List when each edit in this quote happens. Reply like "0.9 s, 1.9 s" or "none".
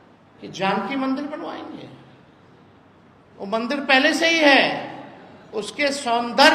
none

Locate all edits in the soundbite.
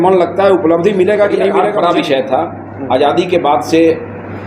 1.6 s

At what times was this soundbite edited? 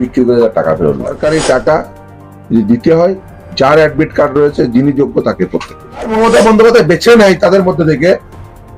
1.2 s, 6.1 s

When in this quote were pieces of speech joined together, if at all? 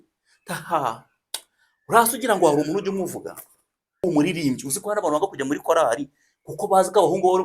4.0 s

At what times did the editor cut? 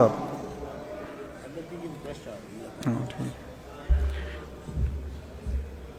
none

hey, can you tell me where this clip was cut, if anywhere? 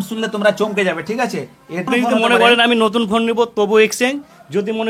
1.8 s

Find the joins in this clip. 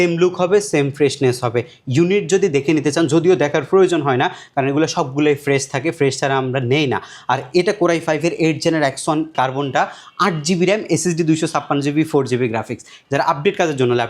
9.3 s, 12.9 s

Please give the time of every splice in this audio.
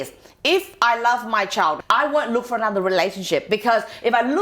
1.8 s

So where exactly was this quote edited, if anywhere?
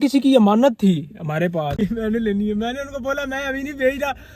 1.7 s

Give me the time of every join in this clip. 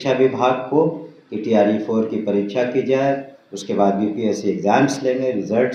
none

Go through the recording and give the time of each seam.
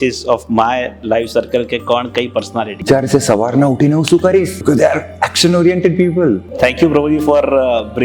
2.8 s, 4.6 s, 6.5 s

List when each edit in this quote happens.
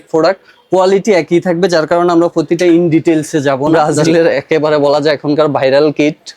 3.7 s

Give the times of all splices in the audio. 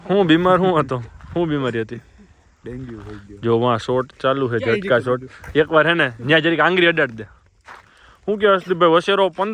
1.6 s

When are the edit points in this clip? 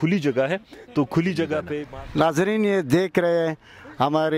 1.8 s

